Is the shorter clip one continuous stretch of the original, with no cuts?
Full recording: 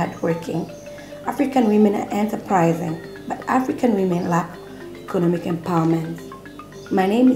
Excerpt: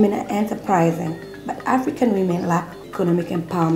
no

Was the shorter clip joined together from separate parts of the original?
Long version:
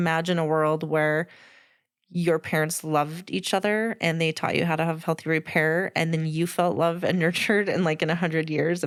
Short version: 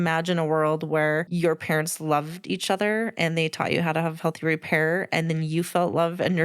yes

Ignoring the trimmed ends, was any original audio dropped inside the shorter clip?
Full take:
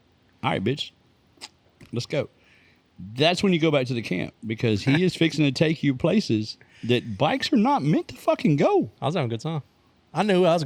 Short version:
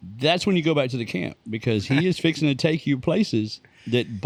no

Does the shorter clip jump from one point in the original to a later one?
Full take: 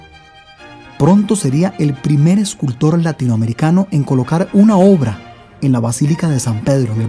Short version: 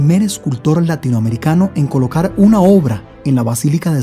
yes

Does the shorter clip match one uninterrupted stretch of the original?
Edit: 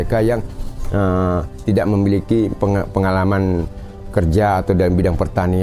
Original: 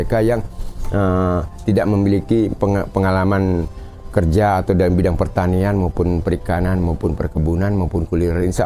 yes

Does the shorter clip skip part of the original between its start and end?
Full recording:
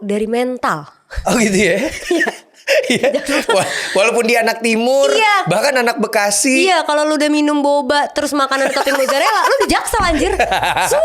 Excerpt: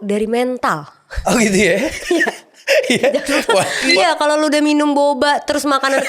yes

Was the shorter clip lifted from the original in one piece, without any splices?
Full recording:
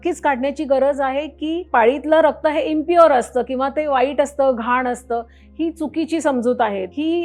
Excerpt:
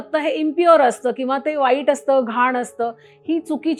yes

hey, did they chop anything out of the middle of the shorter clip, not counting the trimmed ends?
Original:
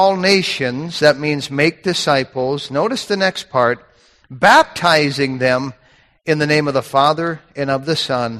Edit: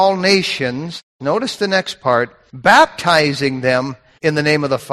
yes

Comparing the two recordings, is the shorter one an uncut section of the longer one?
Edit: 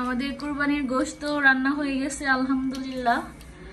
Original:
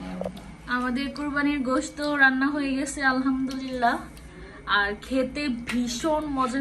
yes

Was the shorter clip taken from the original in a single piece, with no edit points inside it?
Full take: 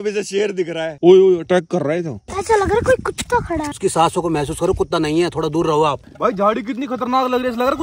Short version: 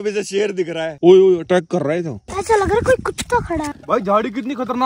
no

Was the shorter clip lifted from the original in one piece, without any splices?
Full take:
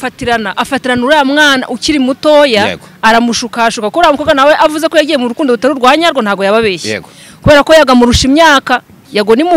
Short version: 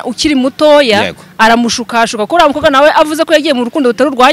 yes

